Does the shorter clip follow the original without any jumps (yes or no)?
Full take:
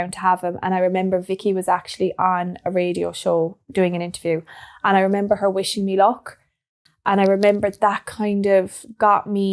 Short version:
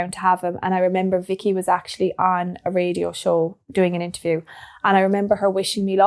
yes